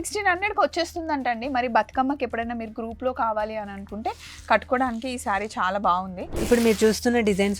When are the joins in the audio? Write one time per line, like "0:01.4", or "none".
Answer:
0:06.4